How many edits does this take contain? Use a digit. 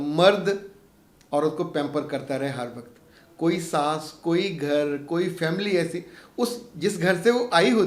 0